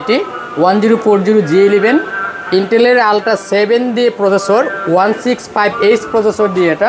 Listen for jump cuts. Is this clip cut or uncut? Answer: uncut